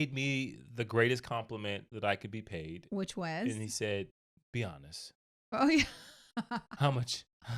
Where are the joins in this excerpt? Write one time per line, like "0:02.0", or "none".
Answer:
none